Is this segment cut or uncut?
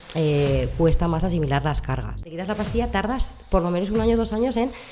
cut